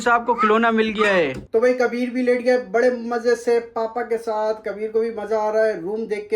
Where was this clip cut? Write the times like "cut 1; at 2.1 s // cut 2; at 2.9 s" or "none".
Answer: cut 1; at 1.4 s